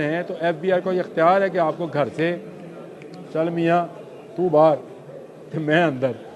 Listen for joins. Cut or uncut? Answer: uncut